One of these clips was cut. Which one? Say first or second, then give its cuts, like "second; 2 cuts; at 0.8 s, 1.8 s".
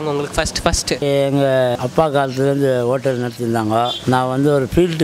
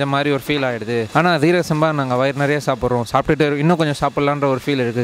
first; 3 cuts; at 1.0 s, 1.8 s, 4.0 s